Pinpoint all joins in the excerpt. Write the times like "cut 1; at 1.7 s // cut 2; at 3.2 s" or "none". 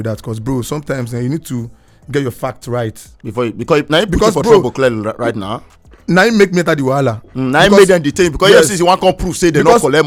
none